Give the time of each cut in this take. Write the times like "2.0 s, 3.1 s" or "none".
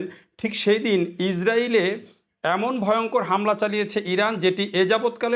none